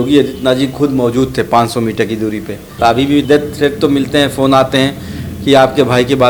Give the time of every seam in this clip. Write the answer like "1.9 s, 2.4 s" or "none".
3.1 s